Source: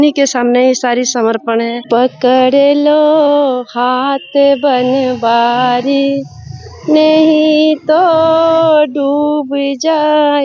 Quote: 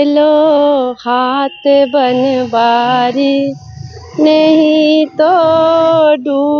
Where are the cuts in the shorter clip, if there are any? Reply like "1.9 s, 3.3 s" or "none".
none